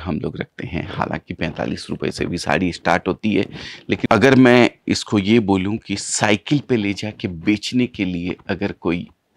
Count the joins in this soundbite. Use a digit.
1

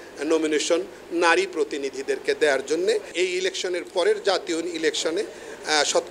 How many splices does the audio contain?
1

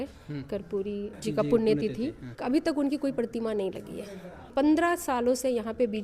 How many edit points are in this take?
3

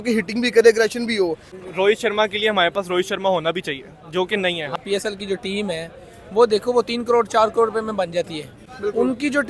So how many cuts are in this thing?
2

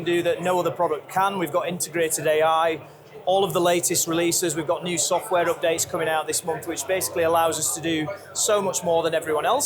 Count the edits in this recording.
0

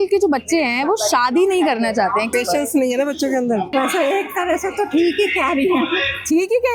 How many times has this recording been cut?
1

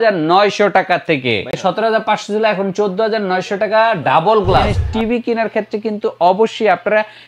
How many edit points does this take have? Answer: 2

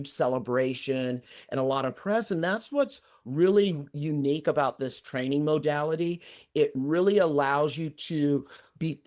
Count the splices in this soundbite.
0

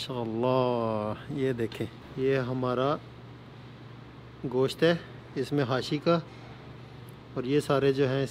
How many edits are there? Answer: 1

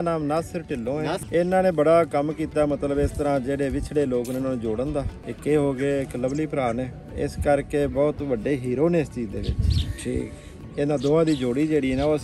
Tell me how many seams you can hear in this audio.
4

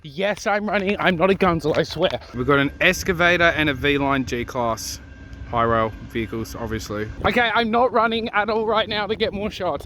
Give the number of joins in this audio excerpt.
2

